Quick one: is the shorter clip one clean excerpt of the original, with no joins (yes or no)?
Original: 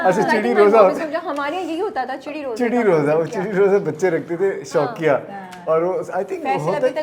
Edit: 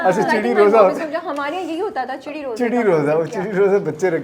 yes